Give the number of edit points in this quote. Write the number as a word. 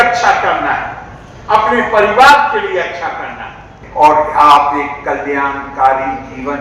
one